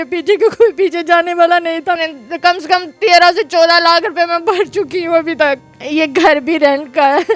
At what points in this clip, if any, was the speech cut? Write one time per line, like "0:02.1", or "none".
0:02.0
0:05.8